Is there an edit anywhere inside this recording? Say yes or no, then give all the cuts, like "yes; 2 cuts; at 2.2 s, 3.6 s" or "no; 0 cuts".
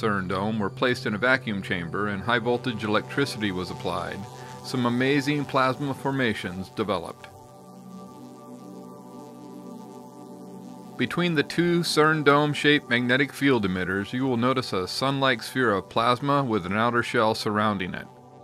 no; 0 cuts